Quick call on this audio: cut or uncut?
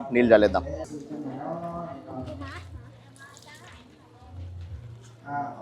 uncut